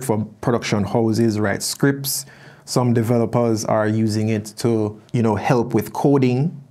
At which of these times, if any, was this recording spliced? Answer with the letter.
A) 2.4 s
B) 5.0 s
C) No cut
B